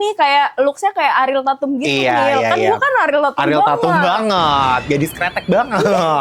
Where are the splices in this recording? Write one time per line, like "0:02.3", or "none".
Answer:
none

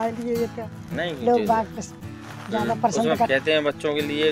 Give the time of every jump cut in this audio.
0:03.3

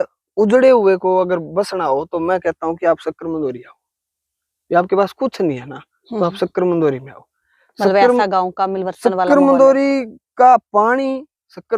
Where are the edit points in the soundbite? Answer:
none

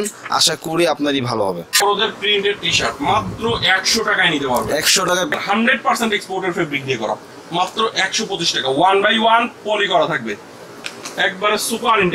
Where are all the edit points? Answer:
0:01.8
0:05.3

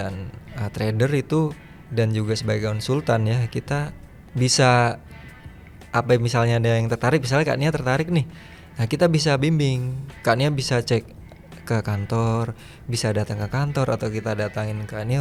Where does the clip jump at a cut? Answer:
none

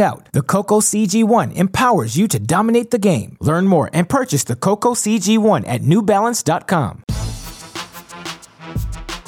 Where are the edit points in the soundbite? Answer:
0:07.0

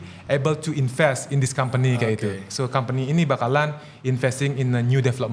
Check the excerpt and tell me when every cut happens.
none

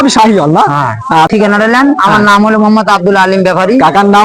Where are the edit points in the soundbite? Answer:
0:01.3

